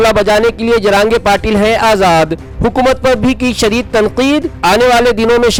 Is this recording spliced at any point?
no; 0 cuts

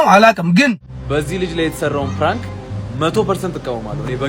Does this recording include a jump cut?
yes; 1 cut; at 0.9 s

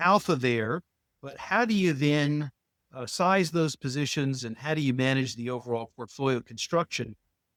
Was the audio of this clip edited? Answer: no; 0 cuts

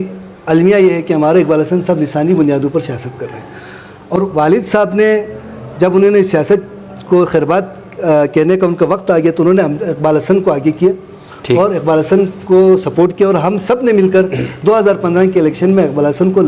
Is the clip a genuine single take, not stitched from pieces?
no; 1 cut; at 4.2 s

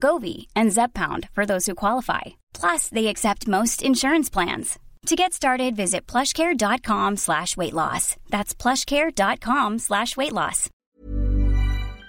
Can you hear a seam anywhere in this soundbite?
yes; 1 cut; at 10.7 s

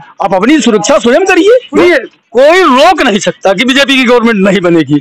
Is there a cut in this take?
yes; 1 cut; at 1.7 s

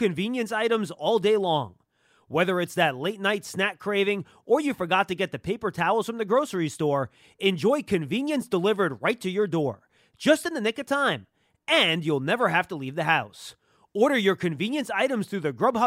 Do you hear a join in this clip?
no; 0 cuts

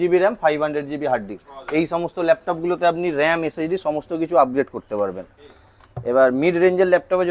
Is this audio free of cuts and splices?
yes; 0 cuts

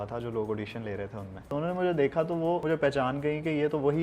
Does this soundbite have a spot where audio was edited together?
yes; 2 cuts; at 1.4 s, 2.6 s

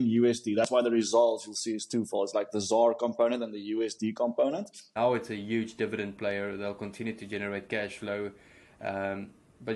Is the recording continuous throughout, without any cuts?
no; 1 cut; at 4.9 s

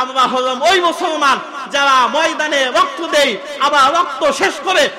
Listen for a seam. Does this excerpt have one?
no; 0 cuts

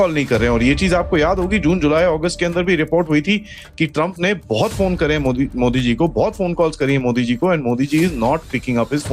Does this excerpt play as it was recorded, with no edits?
yes; 0 cuts

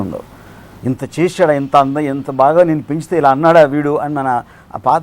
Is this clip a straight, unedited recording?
yes; 0 cuts

